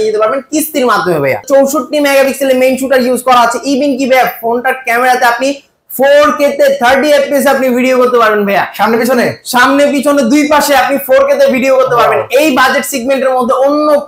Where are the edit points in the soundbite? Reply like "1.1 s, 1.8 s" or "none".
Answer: 1.4 s